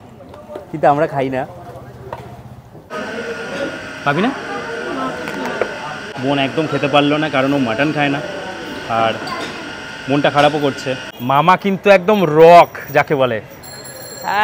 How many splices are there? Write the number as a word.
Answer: three